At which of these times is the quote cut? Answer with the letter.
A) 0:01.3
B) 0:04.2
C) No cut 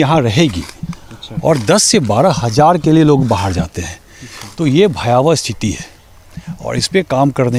C